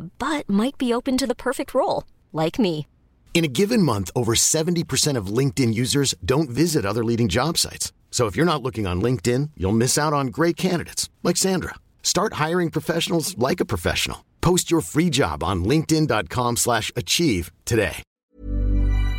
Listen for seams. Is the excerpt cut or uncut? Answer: cut